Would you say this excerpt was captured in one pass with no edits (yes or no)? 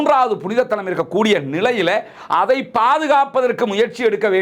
yes